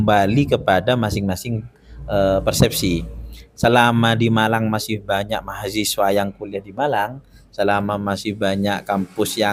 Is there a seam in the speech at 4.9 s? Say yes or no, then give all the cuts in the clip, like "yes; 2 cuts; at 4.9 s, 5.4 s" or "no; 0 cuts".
no; 0 cuts